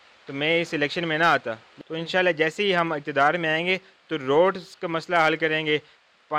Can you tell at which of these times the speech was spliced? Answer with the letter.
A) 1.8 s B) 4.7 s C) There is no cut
A